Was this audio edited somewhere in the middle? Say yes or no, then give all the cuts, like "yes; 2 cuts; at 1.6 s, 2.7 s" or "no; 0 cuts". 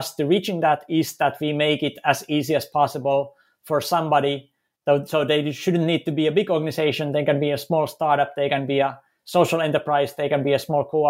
no; 0 cuts